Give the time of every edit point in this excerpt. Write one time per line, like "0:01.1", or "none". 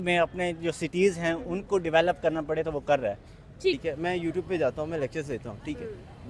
0:03.8